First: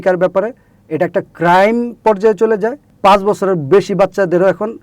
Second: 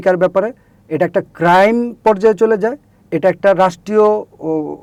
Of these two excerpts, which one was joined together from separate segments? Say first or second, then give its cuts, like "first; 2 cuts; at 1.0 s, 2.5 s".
first; 1 cut; at 2.8 s